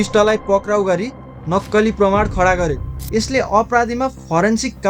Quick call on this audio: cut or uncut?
cut